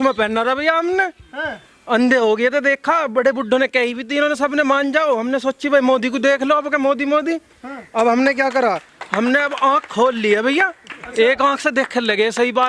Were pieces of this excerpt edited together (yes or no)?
no